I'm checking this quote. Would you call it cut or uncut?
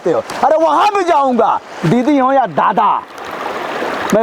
uncut